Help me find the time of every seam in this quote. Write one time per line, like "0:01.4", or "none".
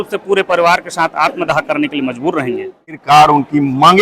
0:03.0

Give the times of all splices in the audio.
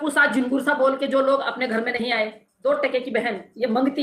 0:02.5

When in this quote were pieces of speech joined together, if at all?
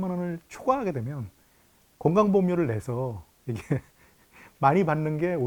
none

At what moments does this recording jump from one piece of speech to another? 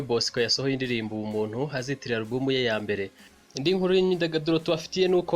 0:03.3

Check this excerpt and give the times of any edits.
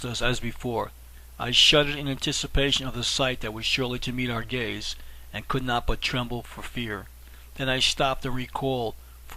0:06.9

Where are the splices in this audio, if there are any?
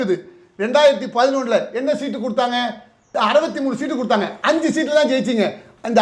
none

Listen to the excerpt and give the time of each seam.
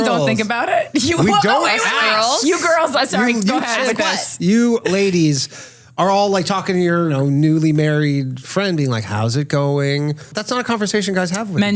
0:07.1
0:10.3

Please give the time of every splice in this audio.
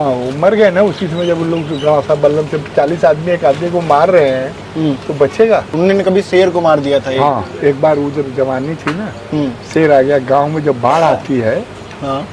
0:05.7

